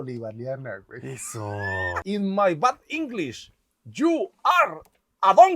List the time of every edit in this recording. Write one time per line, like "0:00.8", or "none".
0:01.9

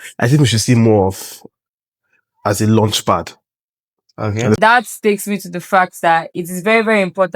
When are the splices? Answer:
0:04.6

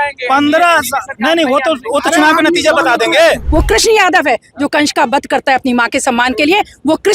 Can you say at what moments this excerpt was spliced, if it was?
0:03.4

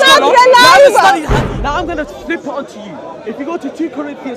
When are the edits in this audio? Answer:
0:01.3

